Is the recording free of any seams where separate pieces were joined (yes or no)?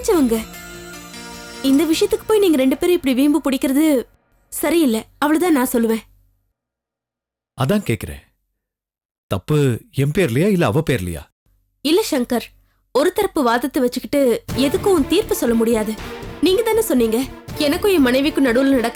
yes